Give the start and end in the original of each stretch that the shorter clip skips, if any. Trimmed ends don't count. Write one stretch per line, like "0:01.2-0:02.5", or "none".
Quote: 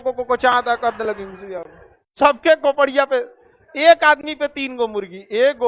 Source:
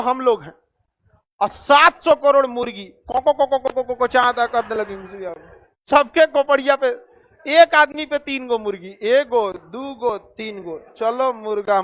none